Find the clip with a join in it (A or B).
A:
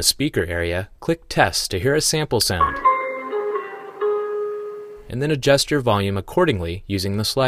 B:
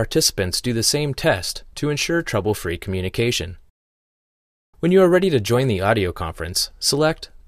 A